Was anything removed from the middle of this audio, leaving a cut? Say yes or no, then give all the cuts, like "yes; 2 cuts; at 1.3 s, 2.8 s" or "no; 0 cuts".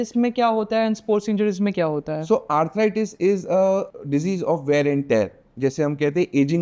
yes; 1 cut; at 3.9 s